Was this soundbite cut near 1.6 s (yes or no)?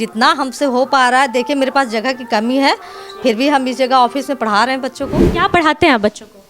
no